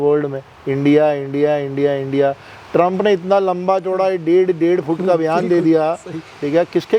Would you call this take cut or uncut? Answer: uncut